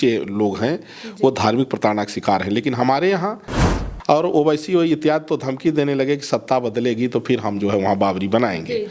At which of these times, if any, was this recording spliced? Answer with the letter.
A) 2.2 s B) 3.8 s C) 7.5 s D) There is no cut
B